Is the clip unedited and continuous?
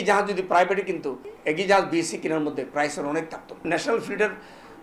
no; 2 cuts; at 1.2 s, 3.6 s

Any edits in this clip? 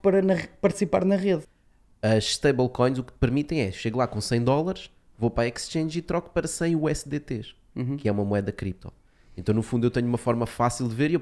yes; 1 cut; at 1.5 s

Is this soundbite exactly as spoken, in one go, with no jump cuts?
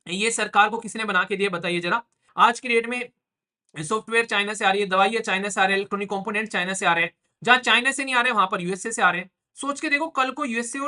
no; 1 cut; at 2.2 s

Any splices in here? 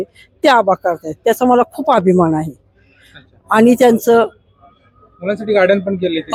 no; 0 cuts

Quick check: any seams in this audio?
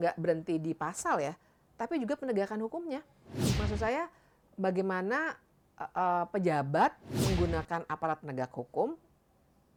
no; 0 cuts

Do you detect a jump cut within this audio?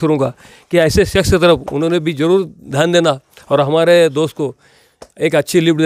no; 0 cuts

